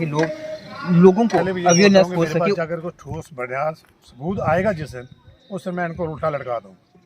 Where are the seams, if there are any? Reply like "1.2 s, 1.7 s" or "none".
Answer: 2.5 s